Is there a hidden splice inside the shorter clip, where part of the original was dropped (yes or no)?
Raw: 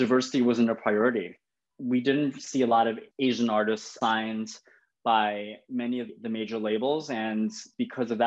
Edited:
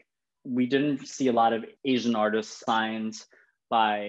no